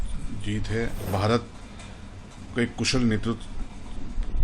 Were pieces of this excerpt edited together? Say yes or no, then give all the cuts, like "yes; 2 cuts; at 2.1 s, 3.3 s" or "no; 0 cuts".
yes; 1 cut; at 1.1 s